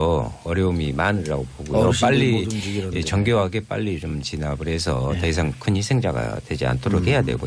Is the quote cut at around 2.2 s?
no; 1 cut; at 6.1 s

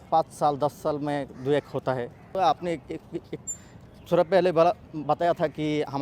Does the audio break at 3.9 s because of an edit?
no; 1 cut; at 2.3 s

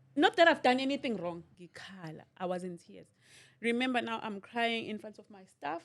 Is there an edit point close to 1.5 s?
yes; 1 cut; at 1.5 s

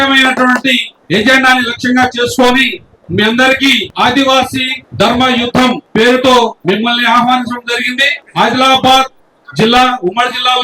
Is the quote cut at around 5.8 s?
yes; 5 cuts; at 0.9 s, 3.9 s, 4.8 s, 5.8 s, 6.6 s

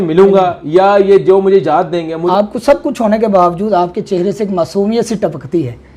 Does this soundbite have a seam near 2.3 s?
yes; 1 cut; at 2.3 s

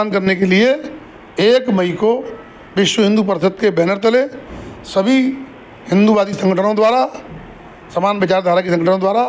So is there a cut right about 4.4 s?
no; 0 cuts

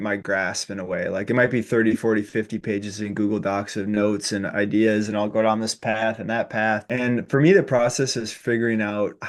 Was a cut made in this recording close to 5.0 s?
no; 1 cut; at 6.8 s

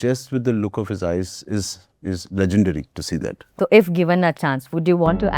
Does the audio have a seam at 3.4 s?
yes; 1 cut; at 3.4 s

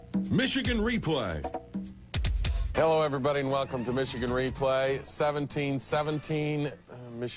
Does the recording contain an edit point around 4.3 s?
no; 1 cut; at 2.6 s

